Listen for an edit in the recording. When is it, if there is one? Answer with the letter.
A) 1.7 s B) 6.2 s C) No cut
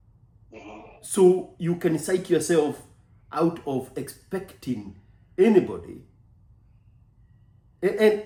C